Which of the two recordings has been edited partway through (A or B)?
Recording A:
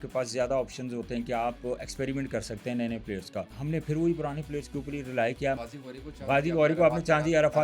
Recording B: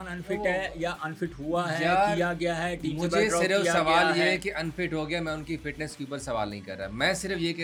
A